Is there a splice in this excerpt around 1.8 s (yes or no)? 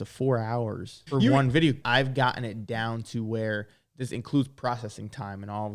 yes